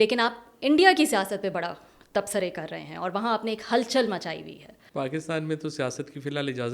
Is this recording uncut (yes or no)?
no